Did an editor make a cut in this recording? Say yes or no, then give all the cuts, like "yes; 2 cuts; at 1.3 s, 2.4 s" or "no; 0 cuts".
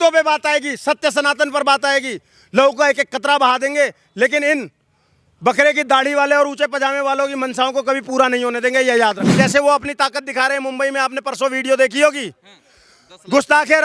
yes; 1 cut; at 9.3 s